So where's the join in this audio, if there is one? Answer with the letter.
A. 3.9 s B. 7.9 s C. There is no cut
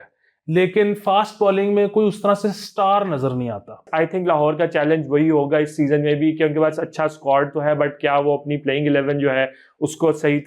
A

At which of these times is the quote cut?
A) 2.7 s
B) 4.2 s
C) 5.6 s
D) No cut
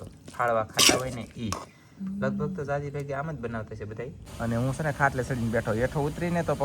B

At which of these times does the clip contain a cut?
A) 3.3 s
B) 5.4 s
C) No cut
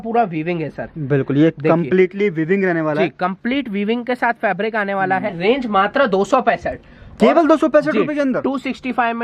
B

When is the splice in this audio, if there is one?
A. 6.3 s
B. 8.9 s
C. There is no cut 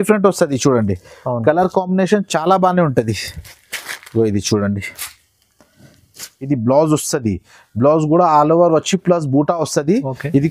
A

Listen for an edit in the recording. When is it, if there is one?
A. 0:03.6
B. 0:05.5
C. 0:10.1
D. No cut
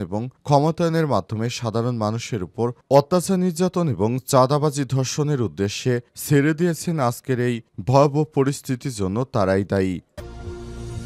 C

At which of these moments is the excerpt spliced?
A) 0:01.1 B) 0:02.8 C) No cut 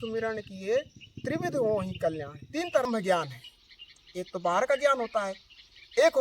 B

